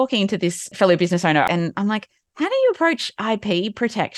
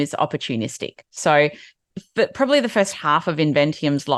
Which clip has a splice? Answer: first; 1 cut; at 1.5 s

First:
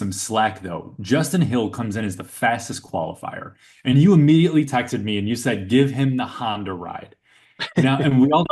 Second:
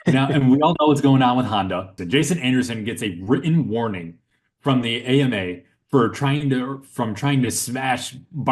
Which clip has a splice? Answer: second; 1 cut; at 2.0 s

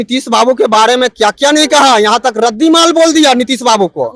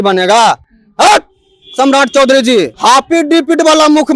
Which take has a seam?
second; 1 cut; at 2.7 s

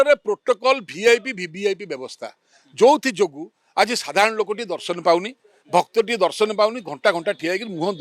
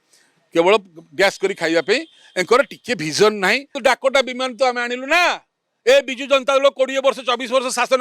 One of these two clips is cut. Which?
second; 1 cut; at 3.7 s

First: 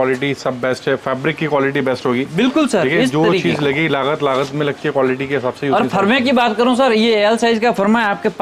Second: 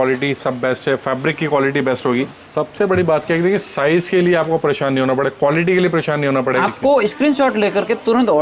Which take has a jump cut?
second; 2 cuts; at 2.3 s, 6.6 s

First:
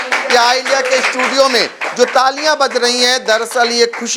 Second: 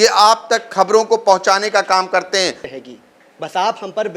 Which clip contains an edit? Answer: second; 1 cut; at 2.6 s

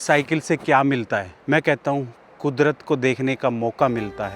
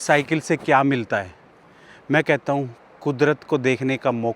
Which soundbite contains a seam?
first; 1 cut; at 1.3 s

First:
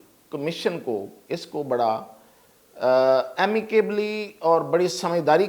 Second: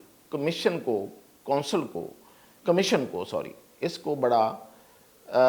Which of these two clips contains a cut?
first; 1 cut; at 1.2 s

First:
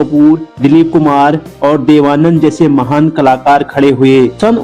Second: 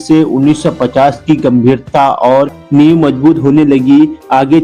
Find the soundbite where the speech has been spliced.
second; 1 cut; at 2.6 s

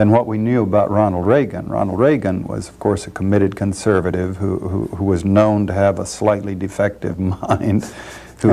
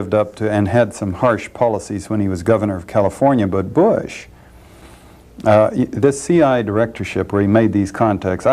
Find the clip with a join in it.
second; 1 cut; at 5.2 s

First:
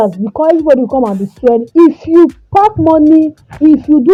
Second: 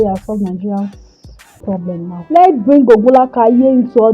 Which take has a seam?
second; 1 cut; at 2.2 s

